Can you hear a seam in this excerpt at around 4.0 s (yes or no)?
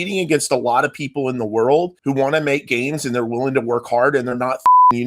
no